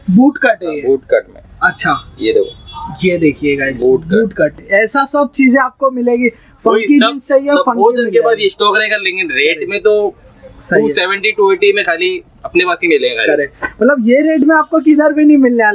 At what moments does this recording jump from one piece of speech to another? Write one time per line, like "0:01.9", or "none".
0:04.6